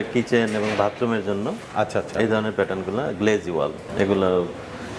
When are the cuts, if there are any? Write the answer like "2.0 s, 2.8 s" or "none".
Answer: 3.9 s